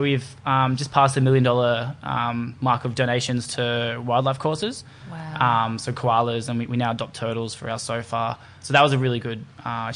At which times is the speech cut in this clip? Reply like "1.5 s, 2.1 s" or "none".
none